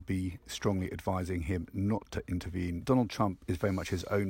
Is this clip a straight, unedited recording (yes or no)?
no